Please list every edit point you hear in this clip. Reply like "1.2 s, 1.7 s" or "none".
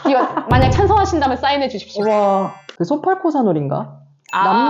2.7 s